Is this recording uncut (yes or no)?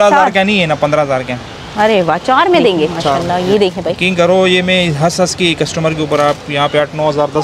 no